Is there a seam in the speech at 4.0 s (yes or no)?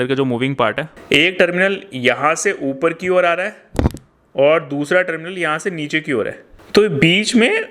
no